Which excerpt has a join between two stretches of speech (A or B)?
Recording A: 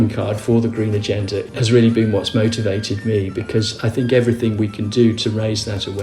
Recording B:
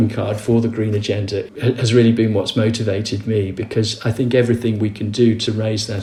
A